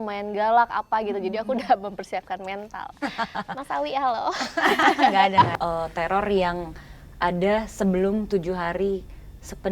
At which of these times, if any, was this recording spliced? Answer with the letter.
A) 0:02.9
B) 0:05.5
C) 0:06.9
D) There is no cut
B